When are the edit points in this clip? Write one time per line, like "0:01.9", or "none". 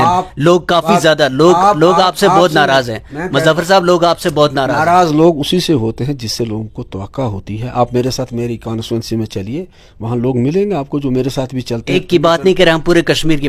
none